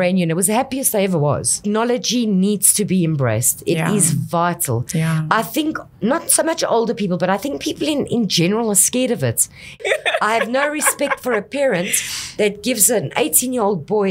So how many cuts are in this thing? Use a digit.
2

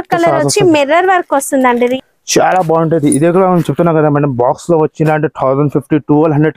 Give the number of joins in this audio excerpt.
1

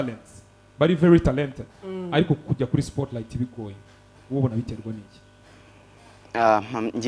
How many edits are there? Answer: 0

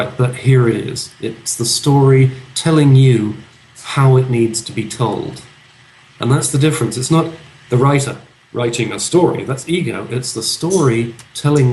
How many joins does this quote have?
0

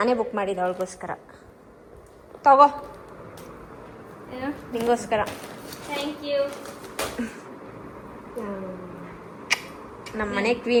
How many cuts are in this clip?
0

